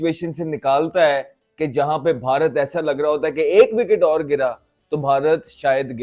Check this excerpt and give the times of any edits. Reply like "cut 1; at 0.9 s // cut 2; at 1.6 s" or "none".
none